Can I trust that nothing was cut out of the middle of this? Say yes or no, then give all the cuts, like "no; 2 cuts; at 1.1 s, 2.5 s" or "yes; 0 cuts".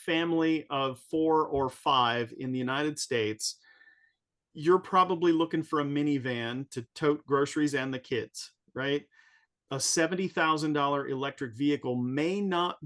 yes; 0 cuts